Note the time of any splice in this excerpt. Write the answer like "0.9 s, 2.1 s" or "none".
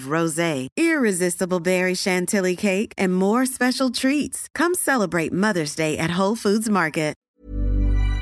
7.2 s

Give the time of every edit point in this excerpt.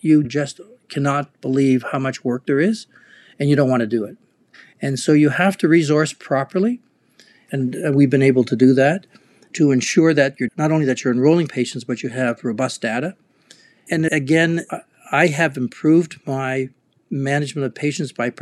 7.4 s

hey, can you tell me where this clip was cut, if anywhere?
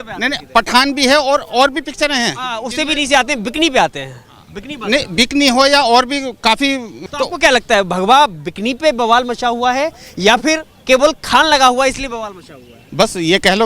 6.9 s, 10.7 s

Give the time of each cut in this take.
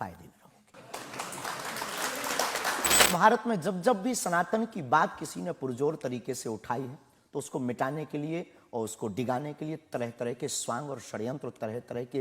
3.0 s

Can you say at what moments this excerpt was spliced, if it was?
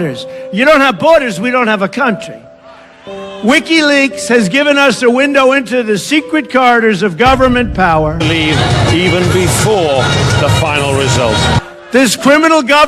none

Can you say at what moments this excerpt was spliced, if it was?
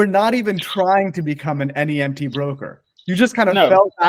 none

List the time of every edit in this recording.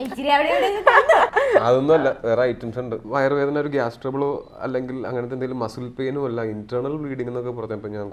1.3 s, 3.0 s

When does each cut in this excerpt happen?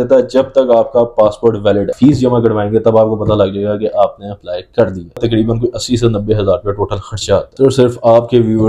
1.9 s, 5.2 s, 7.5 s

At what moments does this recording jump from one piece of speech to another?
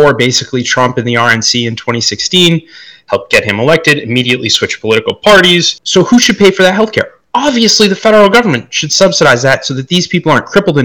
5.8 s

